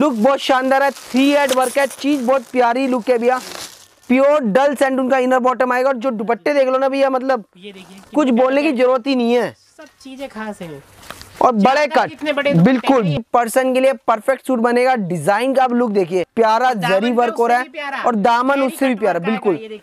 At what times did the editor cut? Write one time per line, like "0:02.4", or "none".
0:13.2
0:16.3